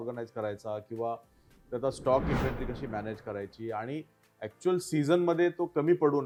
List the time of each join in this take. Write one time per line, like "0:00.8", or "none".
none